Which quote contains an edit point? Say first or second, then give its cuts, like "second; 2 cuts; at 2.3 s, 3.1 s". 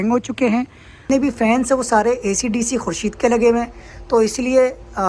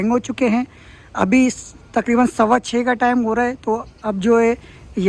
first; 1 cut; at 1.1 s